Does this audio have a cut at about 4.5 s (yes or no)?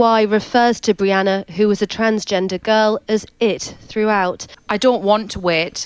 yes